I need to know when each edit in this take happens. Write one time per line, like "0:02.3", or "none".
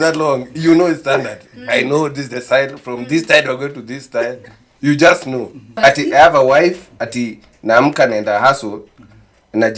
0:05.8